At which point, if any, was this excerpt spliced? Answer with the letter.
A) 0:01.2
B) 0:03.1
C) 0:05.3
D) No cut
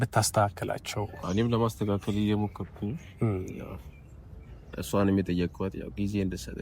A